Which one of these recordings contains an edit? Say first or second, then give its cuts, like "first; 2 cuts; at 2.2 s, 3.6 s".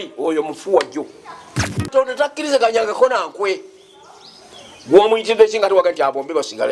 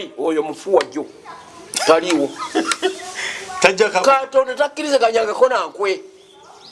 first; 1 cut; at 1.8 s